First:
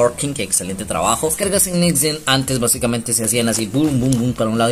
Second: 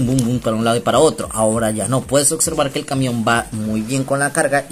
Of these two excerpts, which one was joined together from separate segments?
first; 1 cut; at 1.4 s

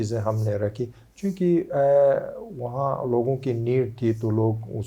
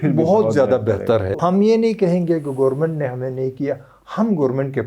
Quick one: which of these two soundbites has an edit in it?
second; 1 cut; at 1.3 s

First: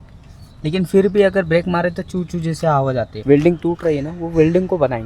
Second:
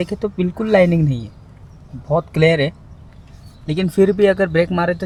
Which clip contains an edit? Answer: first; 1 cut; at 3.1 s

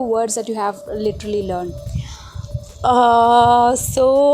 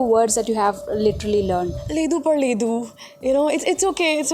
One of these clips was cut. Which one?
second; 1 cut; at 1.8 s

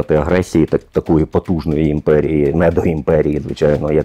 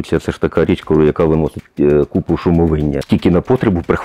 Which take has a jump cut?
second; 1 cut; at 3.0 s

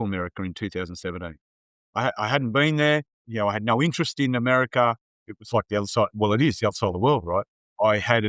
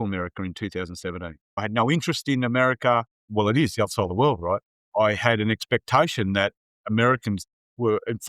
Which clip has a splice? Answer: second; 2 cuts; at 1.6 s, 3.3 s

